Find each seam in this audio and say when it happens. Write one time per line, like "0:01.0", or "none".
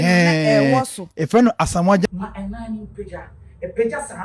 0:02.1